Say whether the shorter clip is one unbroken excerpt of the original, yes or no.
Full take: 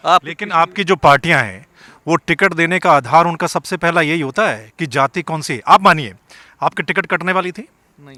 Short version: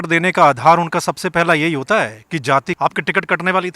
no